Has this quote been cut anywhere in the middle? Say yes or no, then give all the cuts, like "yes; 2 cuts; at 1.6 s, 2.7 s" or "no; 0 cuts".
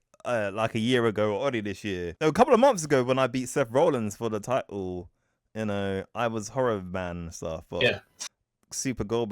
yes; 1 cut; at 2.1 s